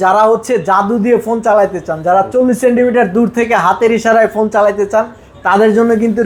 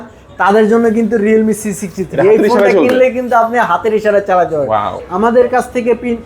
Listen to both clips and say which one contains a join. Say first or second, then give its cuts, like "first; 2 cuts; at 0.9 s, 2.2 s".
second; 1 cut; at 5.0 s